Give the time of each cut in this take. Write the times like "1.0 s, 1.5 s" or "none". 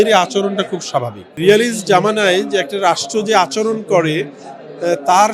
1.4 s